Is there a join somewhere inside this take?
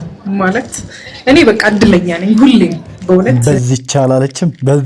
no; 0 cuts

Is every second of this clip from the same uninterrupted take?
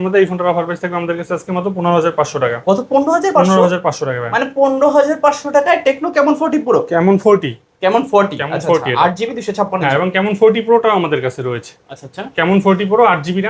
yes; 0 cuts

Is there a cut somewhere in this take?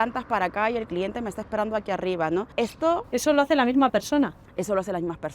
yes; 1 cut; at 2.5 s

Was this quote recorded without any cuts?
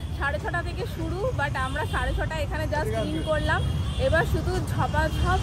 yes; 0 cuts

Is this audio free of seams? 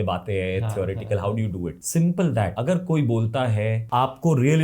no; 2 cuts; at 1.8 s, 2.6 s

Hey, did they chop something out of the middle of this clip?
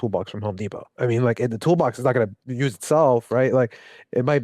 yes; 1 cut; at 2.4 s

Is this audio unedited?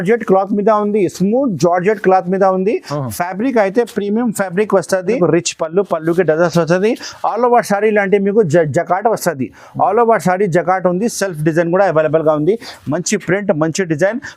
no; 1 cut; at 5.2 s

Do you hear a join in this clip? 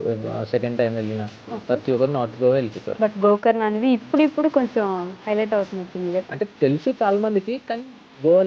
yes; 2 cuts; at 2.8 s, 6.3 s

